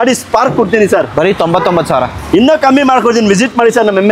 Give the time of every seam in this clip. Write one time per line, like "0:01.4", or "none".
none

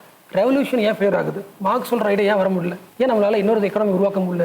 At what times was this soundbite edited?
0:01.5
0:02.8

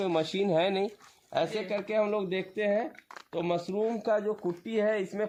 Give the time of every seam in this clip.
none

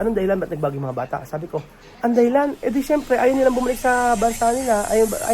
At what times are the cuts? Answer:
0:01.8

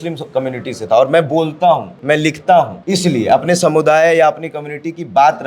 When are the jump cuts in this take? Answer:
0:01.9
0:02.8

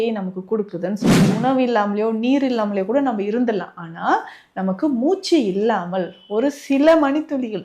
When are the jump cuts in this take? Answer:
0:01.2

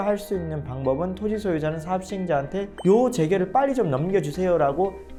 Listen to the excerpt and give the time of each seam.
none

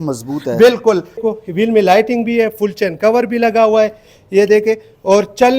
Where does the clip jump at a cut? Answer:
0:01.2

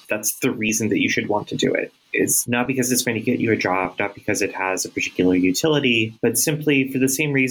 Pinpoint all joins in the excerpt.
0:02.7
0:06.5

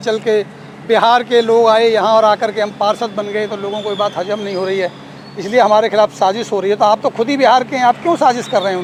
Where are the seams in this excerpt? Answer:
none

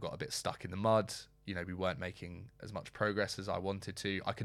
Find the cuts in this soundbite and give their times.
none

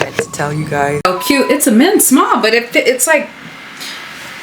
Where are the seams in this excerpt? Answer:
0:01.1

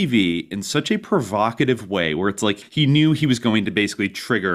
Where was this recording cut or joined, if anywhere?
0:02.6

